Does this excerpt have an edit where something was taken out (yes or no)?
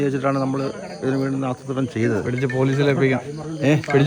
no